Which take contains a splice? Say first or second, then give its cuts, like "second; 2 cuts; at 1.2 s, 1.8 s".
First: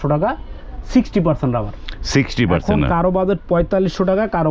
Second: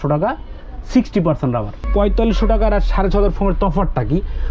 second; 1 cut; at 1.9 s